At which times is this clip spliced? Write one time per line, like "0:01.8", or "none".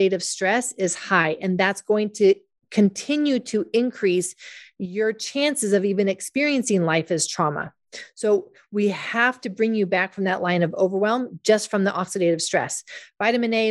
none